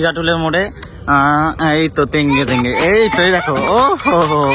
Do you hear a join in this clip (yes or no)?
no